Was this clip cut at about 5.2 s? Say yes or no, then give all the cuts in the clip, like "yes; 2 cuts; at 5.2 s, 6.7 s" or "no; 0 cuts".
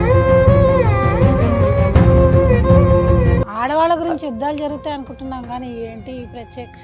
no; 1 cut; at 3.4 s